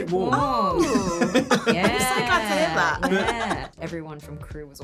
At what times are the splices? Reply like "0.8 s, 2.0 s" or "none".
3.7 s